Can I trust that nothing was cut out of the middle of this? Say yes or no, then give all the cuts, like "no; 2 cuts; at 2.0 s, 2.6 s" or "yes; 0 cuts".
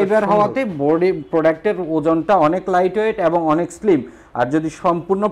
yes; 0 cuts